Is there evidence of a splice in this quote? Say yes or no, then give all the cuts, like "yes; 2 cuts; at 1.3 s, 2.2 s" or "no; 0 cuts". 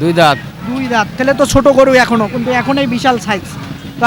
no; 0 cuts